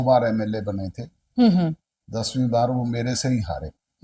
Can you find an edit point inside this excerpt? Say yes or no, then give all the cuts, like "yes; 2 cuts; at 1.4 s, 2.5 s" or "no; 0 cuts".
no; 0 cuts